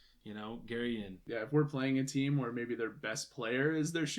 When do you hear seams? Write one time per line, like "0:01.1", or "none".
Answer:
0:01.2